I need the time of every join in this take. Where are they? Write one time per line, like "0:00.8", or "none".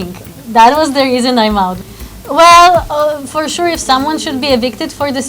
0:01.8